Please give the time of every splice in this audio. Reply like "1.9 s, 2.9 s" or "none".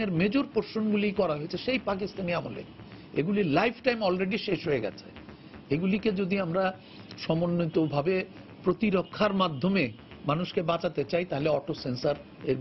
none